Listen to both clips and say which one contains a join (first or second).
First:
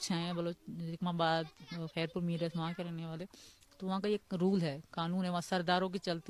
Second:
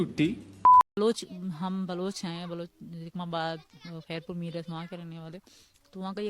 second